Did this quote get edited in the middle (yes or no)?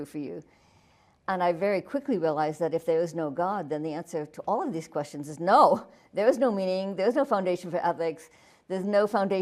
no